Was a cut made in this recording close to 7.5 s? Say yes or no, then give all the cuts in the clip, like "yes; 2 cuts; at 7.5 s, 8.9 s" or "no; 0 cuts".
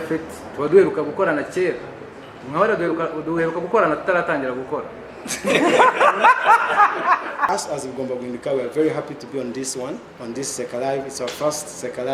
yes; 1 cut; at 7.5 s